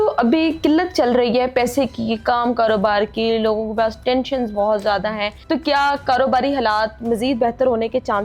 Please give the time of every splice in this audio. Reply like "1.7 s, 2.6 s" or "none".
5.3 s